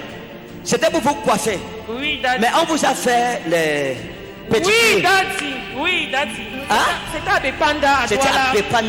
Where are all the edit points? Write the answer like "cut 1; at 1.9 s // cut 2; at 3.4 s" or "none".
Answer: none

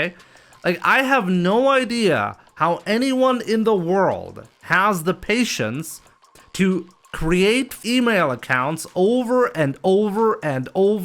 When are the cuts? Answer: cut 1; at 7.8 s

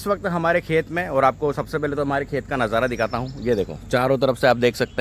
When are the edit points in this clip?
none

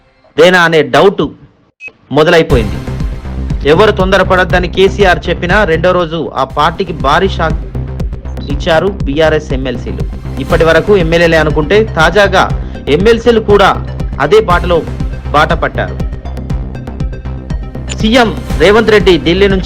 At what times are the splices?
cut 1; at 15.9 s // cut 2; at 18.0 s

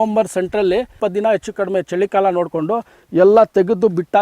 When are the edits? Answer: cut 1; at 0.9 s

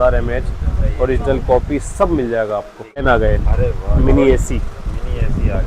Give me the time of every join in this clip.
cut 1; at 3.0 s

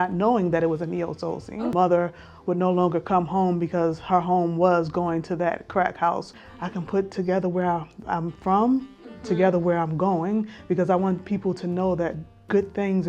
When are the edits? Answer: cut 1; at 1.5 s // cut 2; at 6.4 s

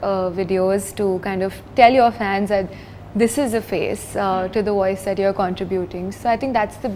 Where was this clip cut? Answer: none

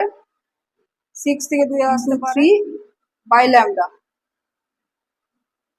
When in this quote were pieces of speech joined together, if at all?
cut 1; at 2.0 s

